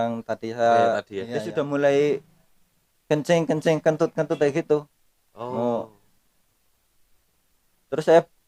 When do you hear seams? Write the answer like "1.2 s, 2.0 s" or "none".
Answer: 1.4 s